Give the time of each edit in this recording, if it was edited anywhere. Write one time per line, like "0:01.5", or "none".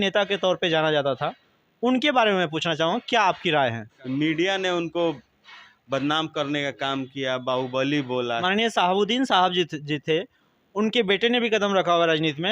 0:03.9
0:08.4